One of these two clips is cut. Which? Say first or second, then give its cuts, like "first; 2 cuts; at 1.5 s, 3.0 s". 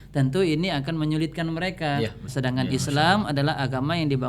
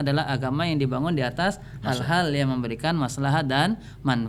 first; 1 cut; at 2.3 s